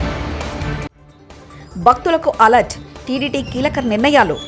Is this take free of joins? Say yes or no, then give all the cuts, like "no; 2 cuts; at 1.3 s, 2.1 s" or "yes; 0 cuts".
yes; 0 cuts